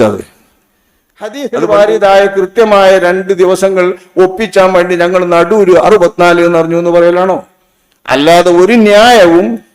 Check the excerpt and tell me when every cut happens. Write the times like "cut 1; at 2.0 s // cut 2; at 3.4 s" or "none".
cut 1; at 1.4 s